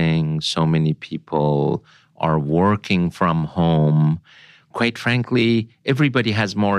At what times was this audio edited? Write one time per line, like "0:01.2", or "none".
none